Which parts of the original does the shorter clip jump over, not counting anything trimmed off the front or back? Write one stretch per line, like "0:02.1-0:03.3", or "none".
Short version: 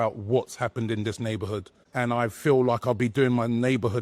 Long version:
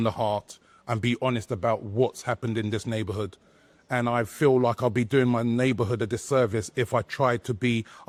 0:03.4-0:03.7